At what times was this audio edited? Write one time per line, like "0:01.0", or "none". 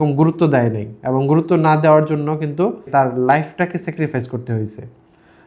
0:02.8